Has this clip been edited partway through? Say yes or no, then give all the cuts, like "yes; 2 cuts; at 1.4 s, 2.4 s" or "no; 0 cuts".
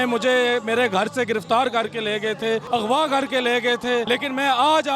yes; 2 cuts; at 2.6 s, 4.1 s